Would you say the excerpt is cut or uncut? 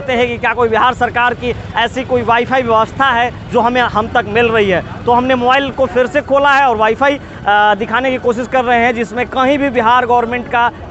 uncut